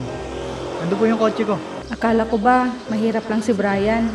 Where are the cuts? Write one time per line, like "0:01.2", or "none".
0:01.8